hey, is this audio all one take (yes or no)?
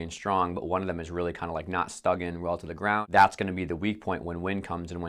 no